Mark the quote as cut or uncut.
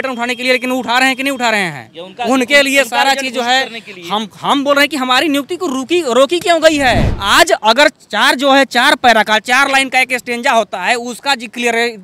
cut